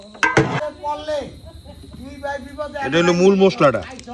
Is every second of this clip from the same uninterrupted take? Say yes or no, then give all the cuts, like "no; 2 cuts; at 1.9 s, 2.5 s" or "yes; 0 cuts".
yes; 0 cuts